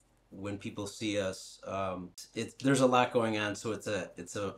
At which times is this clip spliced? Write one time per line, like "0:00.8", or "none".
0:02.2